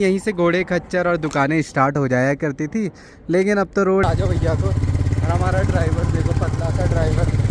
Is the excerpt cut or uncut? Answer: cut